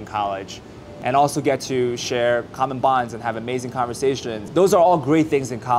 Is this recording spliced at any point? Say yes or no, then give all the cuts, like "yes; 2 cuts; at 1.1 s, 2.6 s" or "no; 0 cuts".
yes; 2 cuts; at 0.9 s, 4.4 s